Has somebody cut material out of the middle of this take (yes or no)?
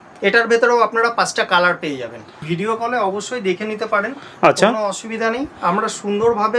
yes